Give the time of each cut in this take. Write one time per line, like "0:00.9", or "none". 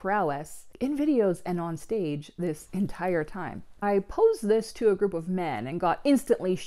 0:03.7